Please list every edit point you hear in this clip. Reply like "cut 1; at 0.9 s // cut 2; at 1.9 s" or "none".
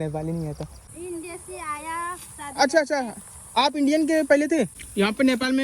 cut 1; at 0.9 s // cut 2; at 4.8 s